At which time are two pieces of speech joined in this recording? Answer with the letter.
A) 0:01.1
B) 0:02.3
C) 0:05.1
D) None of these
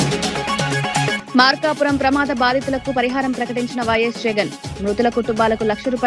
A